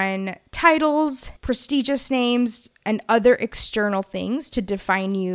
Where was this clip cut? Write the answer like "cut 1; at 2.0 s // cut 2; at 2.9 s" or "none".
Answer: none